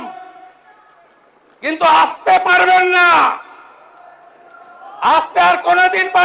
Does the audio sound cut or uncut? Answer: uncut